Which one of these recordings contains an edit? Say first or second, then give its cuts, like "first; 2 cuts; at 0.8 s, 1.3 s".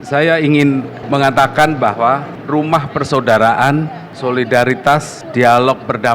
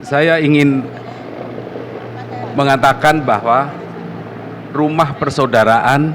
first; 4 cuts; at 1.0 s, 2.3 s, 4.0 s, 5.2 s